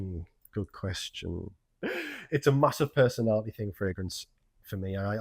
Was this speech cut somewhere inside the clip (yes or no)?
yes